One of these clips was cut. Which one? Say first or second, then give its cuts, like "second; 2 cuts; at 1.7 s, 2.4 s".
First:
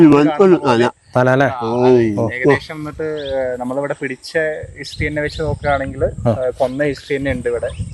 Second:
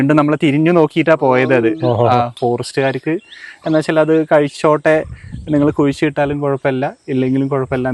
second; 1 cut; at 2.3 s